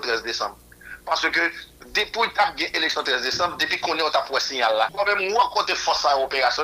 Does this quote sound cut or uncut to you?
cut